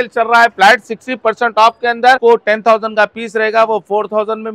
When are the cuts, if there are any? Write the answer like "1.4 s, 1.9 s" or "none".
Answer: 2.2 s